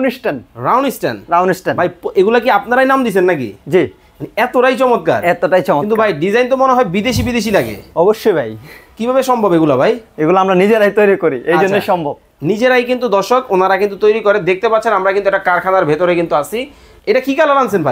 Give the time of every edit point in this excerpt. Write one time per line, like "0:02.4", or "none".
0:16.9